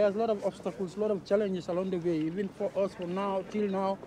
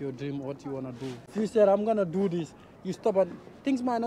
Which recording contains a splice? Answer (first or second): second